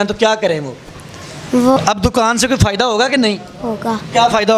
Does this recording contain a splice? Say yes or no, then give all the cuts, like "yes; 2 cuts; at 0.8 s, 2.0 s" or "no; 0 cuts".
yes; 1 cut; at 1.8 s